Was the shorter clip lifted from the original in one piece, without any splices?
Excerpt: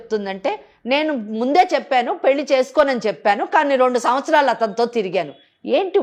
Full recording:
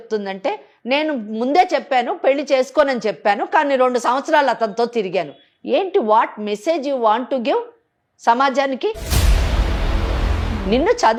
yes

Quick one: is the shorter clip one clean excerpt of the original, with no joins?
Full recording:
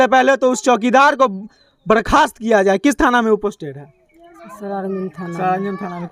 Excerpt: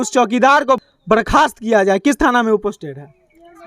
no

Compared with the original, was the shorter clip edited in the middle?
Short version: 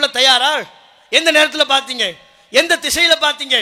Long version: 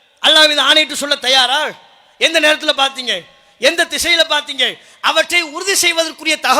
no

